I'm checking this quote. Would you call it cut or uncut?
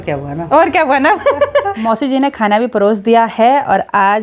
cut